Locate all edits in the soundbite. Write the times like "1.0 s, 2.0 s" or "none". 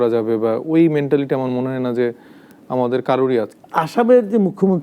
3.6 s

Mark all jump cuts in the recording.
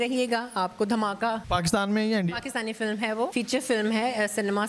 1.4 s, 3.3 s

